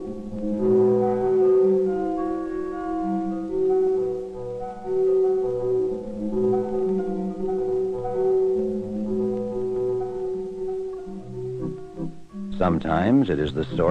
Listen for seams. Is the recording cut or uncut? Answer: cut